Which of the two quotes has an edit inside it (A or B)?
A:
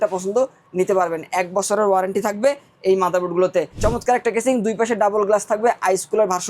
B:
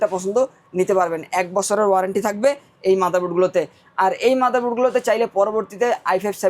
A